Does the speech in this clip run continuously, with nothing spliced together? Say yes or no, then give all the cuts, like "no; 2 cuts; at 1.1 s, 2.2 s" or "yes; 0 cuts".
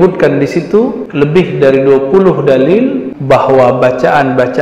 no; 2 cuts; at 1.0 s, 3.1 s